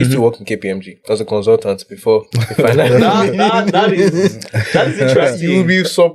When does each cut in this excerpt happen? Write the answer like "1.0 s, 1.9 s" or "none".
0.9 s, 2.4 s